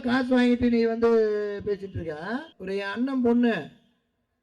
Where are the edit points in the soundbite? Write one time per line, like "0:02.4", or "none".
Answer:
0:02.5